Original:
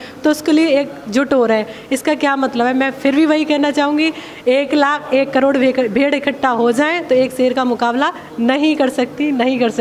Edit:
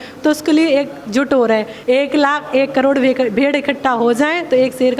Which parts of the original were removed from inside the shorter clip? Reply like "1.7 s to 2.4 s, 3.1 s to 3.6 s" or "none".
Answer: 1.7 s to 4.3 s